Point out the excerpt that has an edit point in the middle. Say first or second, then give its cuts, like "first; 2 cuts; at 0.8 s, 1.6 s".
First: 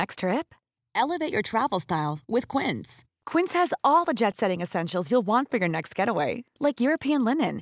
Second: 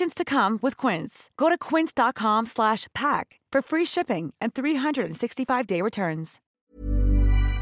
second; 1 cut; at 6.7 s